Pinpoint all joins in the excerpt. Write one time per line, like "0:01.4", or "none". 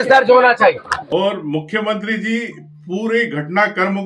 0:00.9